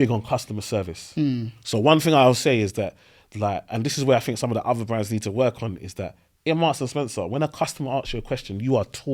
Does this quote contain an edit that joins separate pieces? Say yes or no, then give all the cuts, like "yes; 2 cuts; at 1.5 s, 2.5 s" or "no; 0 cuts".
no; 0 cuts